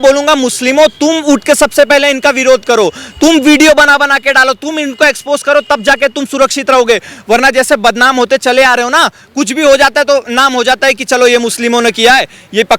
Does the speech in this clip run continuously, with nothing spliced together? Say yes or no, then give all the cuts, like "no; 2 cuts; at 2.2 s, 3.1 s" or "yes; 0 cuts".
yes; 0 cuts